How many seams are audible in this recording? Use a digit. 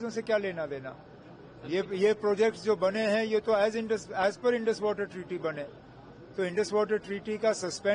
0